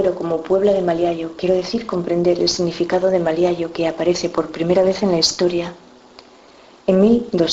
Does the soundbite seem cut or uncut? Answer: cut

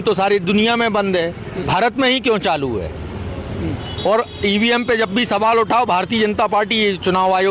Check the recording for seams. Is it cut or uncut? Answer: cut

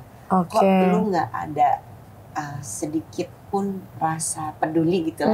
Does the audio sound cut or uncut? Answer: cut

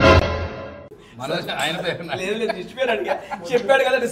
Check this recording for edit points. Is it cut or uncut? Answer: uncut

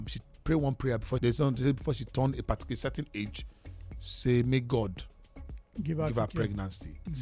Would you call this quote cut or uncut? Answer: cut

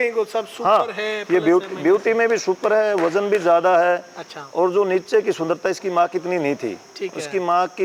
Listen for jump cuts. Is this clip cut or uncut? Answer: uncut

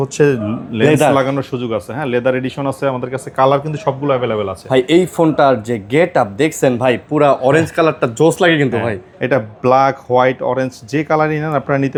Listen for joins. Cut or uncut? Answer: uncut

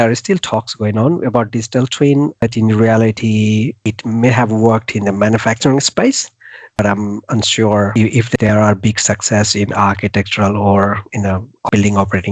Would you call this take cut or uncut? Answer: cut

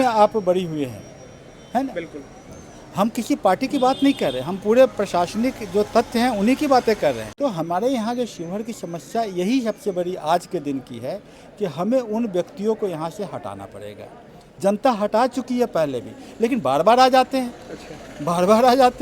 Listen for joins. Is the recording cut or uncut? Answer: cut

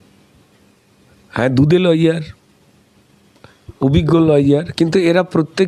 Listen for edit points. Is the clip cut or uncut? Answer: uncut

